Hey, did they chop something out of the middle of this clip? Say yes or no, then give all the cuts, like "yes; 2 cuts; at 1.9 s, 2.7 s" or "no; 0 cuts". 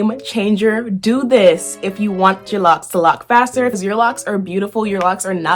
yes; 1 cut; at 3.7 s